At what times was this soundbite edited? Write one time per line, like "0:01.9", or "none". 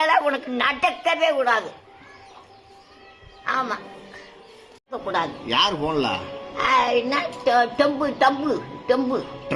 0:05.0